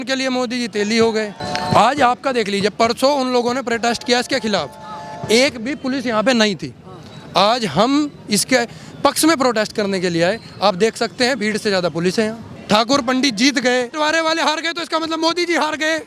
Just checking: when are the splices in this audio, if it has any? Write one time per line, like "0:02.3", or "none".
0:01.4
0:12.5
0:13.9